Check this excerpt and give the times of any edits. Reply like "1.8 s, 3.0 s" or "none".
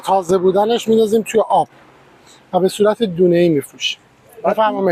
none